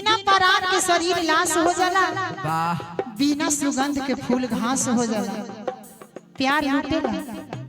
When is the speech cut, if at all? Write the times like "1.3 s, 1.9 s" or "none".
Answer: none

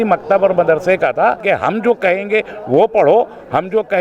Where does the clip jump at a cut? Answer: 1.4 s

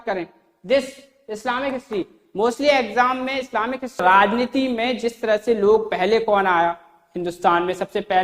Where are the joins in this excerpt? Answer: 4.0 s

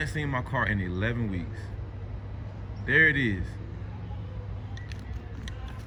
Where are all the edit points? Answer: none

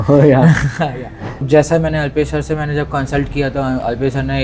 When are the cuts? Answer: 1.4 s

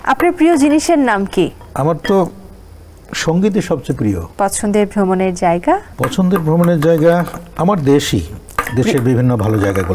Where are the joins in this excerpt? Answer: 1.6 s, 4.3 s, 5.9 s

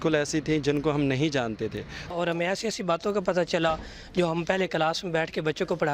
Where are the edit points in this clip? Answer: 2.1 s

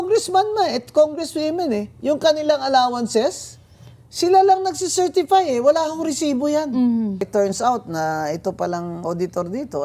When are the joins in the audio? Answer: 7.2 s

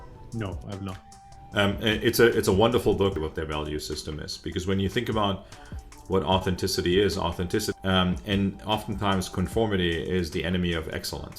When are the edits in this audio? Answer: 3.2 s, 7.7 s

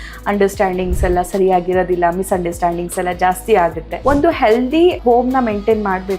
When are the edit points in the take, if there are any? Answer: 3.9 s, 5.0 s

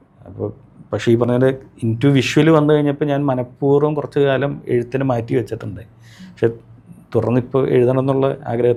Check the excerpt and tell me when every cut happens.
none

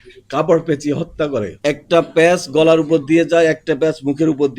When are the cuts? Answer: 1.5 s

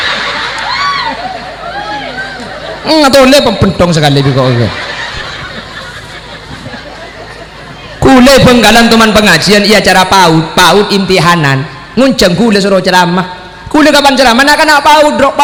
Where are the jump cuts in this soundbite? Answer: none

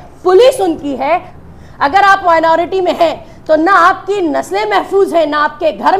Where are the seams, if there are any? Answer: 1.3 s

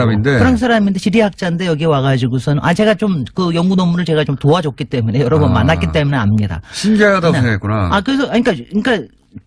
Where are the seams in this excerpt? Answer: 5.0 s

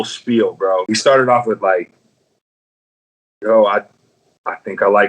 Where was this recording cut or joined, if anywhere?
0.9 s

